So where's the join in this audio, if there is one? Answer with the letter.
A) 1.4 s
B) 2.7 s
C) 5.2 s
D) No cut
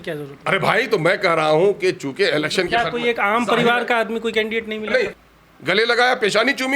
C